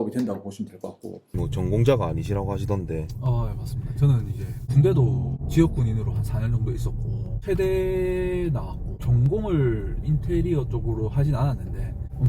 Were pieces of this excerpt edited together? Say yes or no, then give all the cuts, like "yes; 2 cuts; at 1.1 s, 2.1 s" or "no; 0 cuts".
yes; 1 cut; at 1.3 s